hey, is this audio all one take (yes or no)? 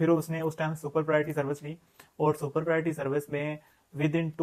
yes